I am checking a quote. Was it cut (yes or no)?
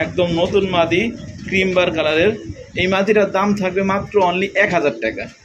no